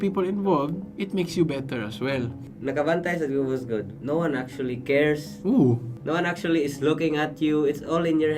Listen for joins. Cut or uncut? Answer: cut